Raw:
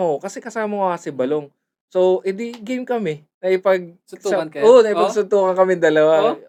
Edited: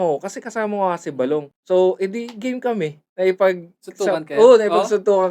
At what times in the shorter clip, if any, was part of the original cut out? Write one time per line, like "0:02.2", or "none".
0:01.5